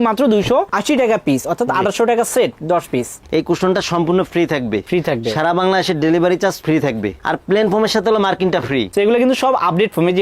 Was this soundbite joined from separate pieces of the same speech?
yes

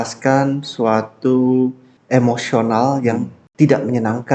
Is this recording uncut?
no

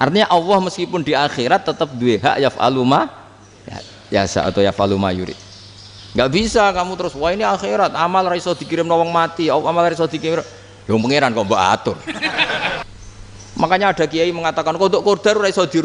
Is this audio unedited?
no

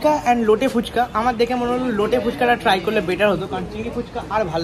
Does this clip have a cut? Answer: no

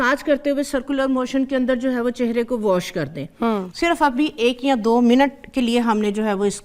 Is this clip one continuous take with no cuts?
no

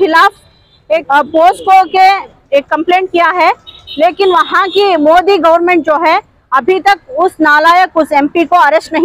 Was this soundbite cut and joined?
yes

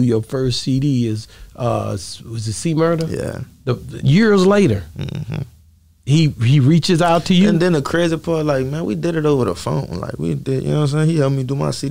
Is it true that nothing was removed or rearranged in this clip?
yes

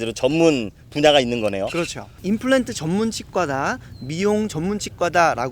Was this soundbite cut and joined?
yes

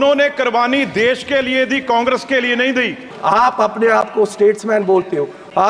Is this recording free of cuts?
no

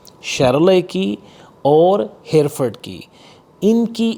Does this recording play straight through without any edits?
yes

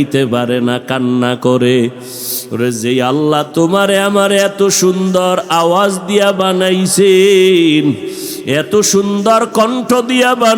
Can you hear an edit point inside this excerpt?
no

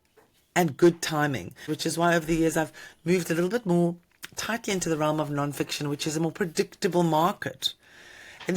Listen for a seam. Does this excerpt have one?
yes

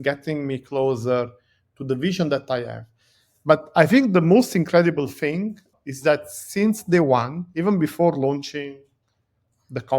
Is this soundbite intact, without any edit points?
no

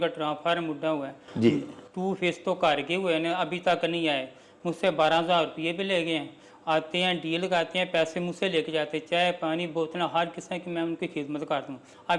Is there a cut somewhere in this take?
no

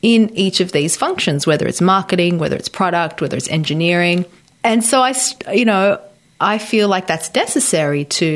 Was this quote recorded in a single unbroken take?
yes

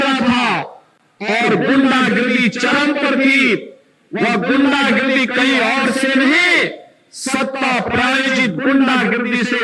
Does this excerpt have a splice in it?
no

